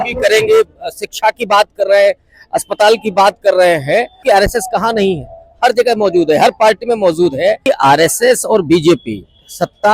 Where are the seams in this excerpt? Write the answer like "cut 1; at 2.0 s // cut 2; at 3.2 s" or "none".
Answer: cut 1; at 4.2 s // cut 2; at 7.6 s